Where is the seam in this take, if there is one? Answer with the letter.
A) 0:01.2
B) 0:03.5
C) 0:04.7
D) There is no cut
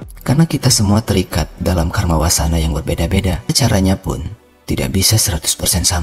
B